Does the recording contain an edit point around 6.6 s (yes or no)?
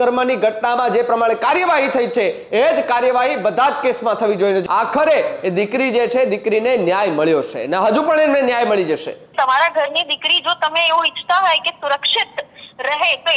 no